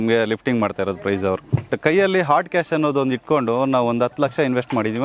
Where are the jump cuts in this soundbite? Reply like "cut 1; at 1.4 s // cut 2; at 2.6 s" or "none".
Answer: cut 1; at 1.7 s